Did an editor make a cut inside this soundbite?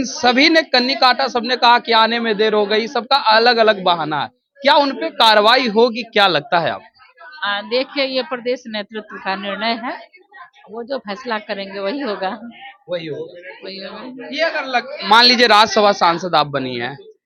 no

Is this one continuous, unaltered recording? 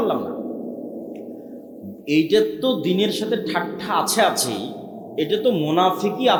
yes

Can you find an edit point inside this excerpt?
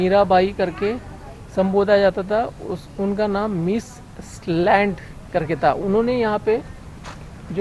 no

